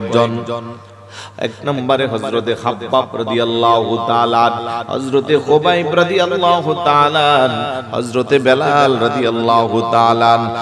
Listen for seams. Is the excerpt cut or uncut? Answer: uncut